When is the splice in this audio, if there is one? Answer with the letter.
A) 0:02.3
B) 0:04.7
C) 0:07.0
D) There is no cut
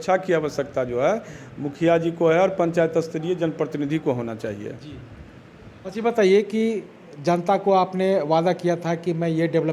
D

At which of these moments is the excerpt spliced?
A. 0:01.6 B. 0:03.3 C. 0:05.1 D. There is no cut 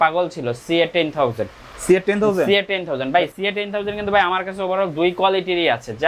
B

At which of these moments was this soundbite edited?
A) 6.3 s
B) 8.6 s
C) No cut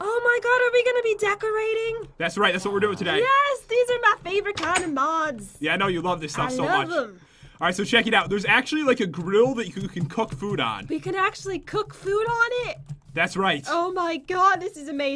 B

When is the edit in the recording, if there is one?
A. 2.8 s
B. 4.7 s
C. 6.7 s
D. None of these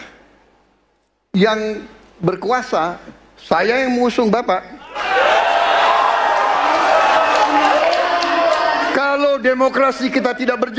C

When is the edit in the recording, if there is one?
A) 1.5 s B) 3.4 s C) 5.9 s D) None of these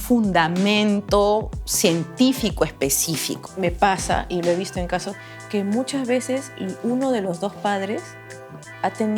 B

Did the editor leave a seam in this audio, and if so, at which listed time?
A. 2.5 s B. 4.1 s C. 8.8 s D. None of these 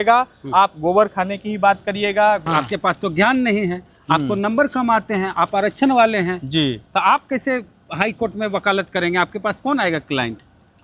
A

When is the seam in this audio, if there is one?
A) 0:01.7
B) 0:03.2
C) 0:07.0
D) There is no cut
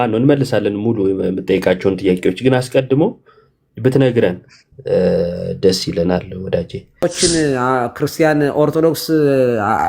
C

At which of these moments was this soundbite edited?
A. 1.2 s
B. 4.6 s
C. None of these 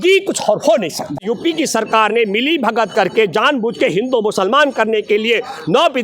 A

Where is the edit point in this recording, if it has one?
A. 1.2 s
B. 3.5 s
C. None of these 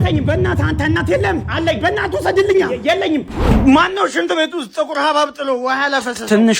B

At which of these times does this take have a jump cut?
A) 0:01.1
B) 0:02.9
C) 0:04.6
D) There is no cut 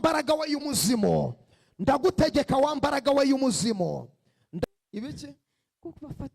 C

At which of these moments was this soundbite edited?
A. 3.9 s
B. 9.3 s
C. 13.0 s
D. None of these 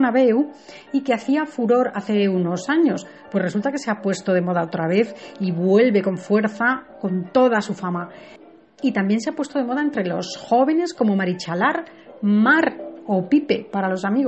B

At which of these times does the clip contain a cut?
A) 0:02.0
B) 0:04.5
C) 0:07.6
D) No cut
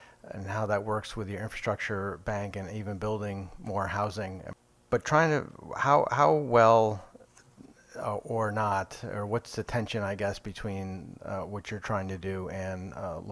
B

